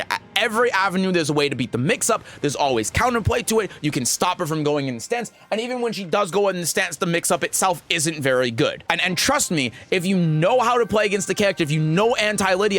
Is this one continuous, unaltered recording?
no; 1 cut; at 8.8 s

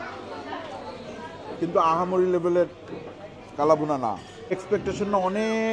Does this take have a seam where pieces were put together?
yes; 1 cut; at 4.5 s

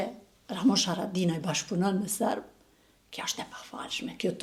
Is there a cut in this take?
no; 0 cuts

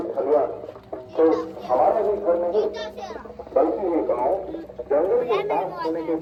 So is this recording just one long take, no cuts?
yes; 0 cuts

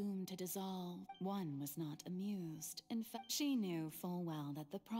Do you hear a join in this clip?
yes; 2 cuts; at 1.1 s, 3.1 s

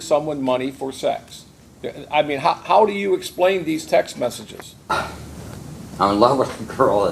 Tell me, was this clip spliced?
yes; 2 cuts; at 4.9 s, 5.9 s

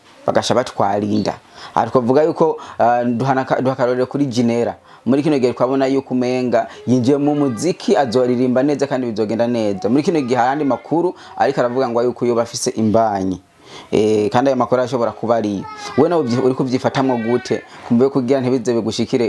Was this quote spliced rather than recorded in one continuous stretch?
no; 0 cuts

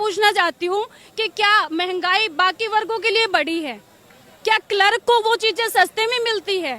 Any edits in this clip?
no; 0 cuts

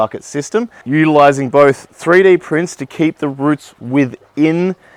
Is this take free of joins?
yes; 0 cuts

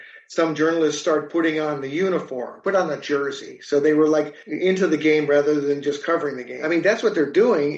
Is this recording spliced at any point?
yes; 1 cut; at 6.5 s

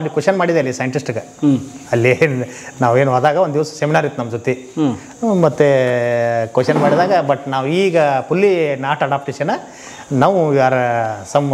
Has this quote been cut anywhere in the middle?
no; 0 cuts

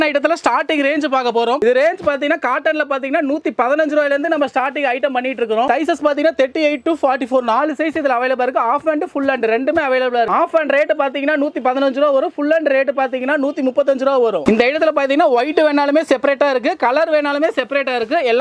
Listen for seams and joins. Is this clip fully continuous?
yes; 0 cuts

